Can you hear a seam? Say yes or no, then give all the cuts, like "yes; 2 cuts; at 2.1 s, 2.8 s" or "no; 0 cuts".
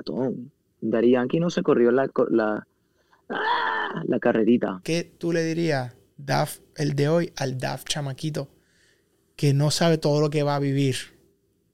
yes; 1 cut; at 4.8 s